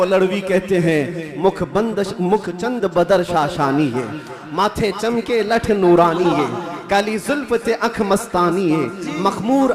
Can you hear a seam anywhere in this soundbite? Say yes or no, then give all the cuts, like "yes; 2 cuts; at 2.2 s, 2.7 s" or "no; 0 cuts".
no; 0 cuts